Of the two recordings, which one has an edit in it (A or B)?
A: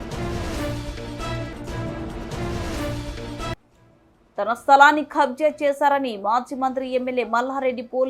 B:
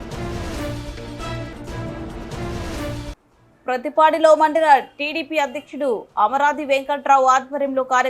B